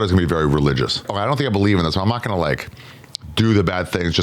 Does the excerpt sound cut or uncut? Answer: cut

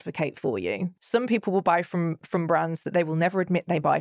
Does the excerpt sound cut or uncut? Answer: cut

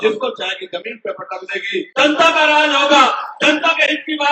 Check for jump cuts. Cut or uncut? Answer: cut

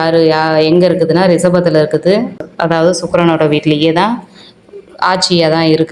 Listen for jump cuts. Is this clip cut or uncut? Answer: cut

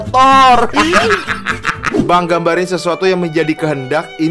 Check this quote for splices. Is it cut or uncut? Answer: cut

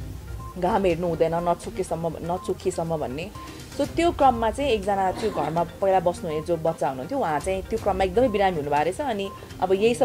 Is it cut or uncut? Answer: uncut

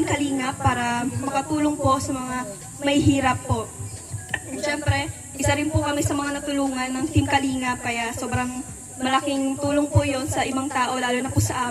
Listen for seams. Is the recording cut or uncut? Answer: uncut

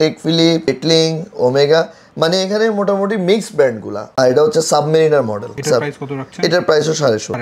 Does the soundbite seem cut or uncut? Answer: cut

